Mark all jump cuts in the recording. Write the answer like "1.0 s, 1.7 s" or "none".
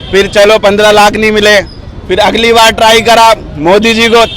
none